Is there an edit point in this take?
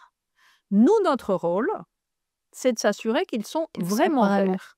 no; 0 cuts

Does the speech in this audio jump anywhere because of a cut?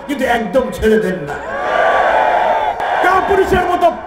yes; 1 cut; at 2.8 s

